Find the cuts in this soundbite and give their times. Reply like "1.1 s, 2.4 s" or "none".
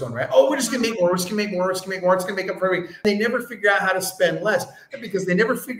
3.0 s